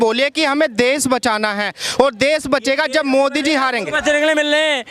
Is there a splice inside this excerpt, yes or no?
no